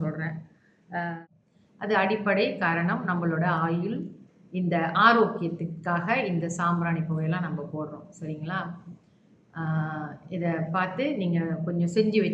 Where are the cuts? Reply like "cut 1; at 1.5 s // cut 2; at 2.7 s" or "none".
cut 1; at 1.2 s